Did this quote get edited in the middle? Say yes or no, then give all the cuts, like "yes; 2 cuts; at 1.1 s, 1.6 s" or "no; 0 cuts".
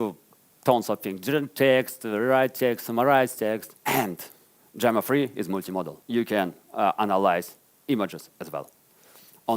yes; 2 cuts; at 3.7 s, 6.0 s